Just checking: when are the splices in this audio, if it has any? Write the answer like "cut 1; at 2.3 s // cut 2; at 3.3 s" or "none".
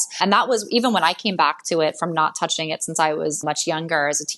cut 1; at 3.4 s